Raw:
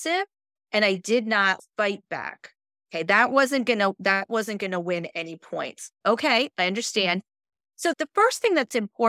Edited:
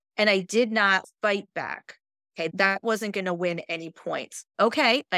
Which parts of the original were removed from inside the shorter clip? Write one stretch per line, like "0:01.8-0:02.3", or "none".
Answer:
0:03.0-0:04.0